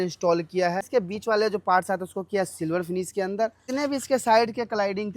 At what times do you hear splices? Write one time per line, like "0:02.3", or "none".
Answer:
0:00.9
0:03.6